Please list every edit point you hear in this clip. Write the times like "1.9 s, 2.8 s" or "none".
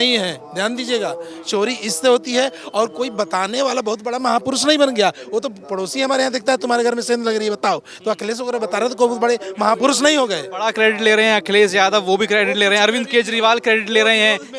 none